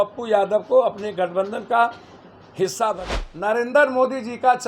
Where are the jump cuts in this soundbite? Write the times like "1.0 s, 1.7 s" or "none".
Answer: 3.0 s